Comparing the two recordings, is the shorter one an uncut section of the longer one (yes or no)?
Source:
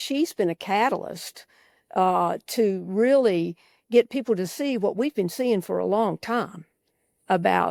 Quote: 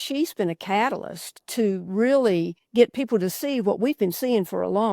no